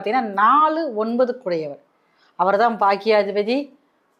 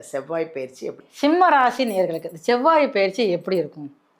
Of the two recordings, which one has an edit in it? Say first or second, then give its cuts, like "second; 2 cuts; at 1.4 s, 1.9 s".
second; 1 cut; at 1.0 s